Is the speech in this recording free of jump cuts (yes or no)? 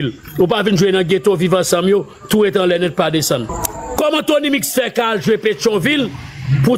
no